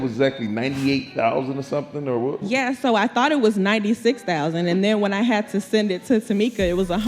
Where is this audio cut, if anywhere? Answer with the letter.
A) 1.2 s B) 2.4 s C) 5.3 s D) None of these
B